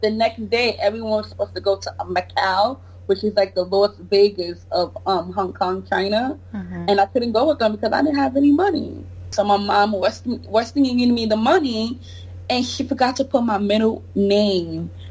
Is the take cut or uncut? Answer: cut